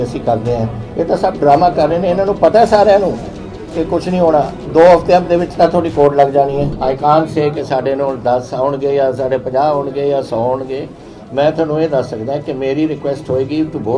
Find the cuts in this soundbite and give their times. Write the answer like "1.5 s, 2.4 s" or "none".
6.7 s